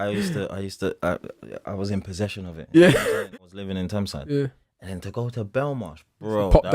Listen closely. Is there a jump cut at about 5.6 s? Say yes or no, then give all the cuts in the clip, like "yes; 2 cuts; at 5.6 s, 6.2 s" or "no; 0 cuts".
no; 1 cut; at 3.2 s